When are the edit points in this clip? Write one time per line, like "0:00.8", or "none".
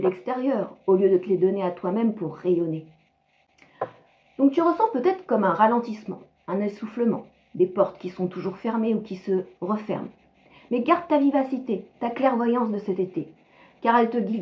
none